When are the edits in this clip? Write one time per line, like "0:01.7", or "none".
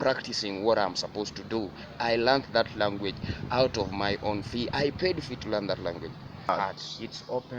0:06.5